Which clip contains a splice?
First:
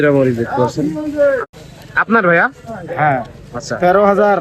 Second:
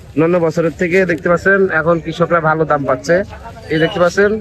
first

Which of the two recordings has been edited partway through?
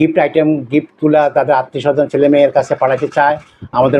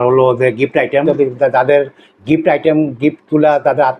second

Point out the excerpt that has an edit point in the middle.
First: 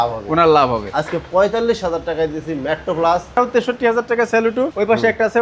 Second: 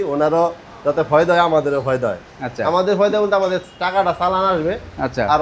first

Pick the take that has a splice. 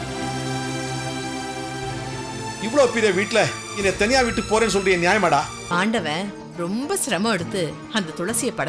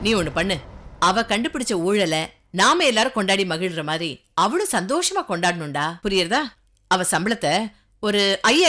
first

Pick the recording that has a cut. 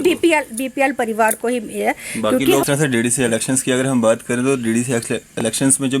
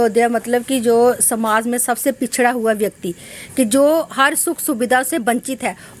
first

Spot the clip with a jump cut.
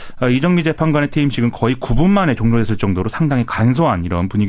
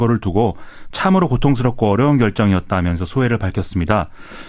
first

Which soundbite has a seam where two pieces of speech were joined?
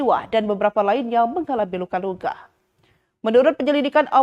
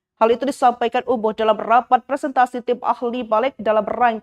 second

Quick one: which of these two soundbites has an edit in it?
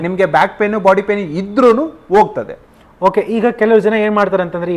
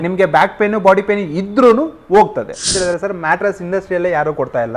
second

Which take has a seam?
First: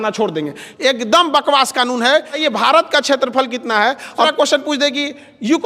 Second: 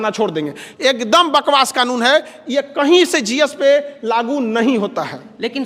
first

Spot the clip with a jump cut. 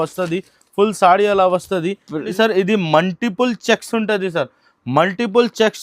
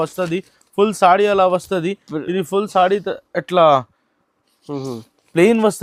first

